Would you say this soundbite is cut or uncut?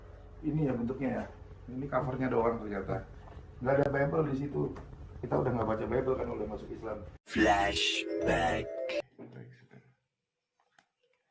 uncut